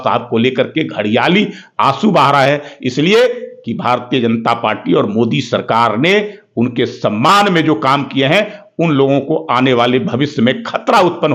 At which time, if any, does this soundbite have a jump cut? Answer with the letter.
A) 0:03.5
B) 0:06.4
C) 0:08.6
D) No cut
D